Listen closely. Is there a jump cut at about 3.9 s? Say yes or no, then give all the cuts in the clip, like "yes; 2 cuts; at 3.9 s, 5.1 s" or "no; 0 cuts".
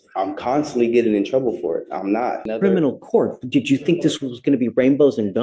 no; 1 cut; at 2.5 s